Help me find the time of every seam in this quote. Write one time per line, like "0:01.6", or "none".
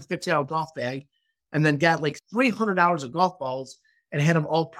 0:02.2